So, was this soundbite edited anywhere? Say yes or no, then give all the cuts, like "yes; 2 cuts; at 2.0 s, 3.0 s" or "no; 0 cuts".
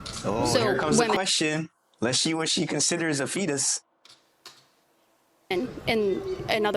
no; 0 cuts